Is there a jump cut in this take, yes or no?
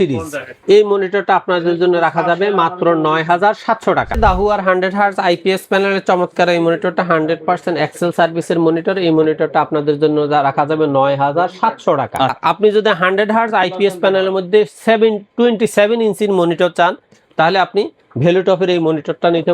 yes